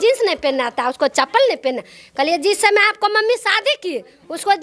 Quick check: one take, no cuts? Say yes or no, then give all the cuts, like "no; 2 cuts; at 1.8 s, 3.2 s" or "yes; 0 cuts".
yes; 0 cuts